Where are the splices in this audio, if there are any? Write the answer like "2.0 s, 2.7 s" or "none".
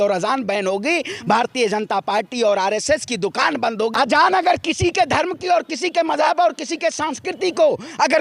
3.9 s